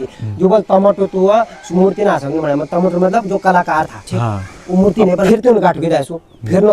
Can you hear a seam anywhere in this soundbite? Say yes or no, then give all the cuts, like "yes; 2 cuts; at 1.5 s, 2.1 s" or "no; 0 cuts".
yes; 1 cut; at 5.3 s